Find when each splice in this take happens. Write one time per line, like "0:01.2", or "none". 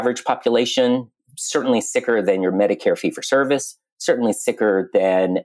none